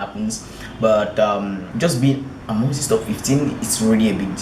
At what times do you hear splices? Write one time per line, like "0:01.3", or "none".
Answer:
0:01.6

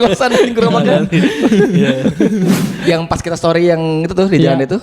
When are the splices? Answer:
0:02.7

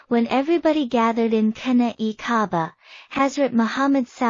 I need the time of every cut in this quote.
0:02.9

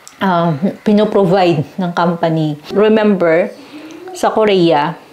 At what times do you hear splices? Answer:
0:02.6

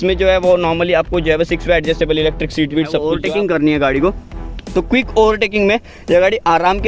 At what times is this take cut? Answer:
0:03.1

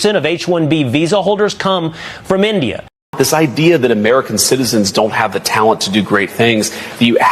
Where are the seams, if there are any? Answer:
0:03.1

